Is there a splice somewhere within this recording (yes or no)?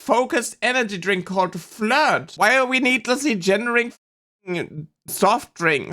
yes